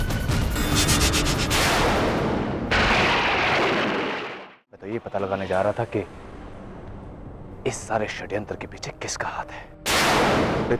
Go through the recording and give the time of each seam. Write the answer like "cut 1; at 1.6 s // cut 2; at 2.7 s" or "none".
cut 1; at 4.9 s